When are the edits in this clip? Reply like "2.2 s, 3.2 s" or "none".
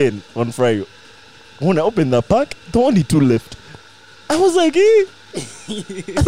none